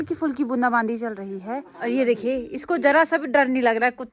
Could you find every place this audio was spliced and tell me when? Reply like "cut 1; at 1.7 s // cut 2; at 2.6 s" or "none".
cut 1; at 1.7 s